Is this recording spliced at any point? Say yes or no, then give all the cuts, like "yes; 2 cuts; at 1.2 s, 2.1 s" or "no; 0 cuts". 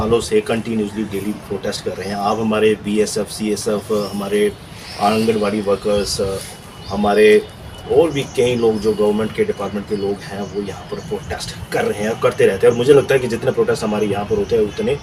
no; 0 cuts